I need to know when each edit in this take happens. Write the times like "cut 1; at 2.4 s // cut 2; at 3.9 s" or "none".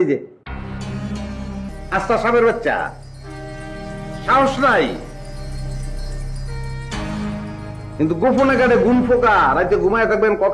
cut 1; at 1.7 s